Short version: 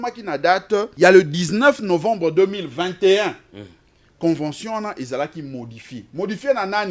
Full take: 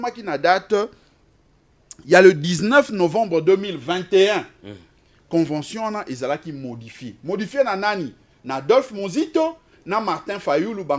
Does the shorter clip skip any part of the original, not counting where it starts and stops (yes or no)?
yes